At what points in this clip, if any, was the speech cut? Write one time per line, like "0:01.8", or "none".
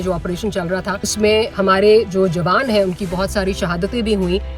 0:01.3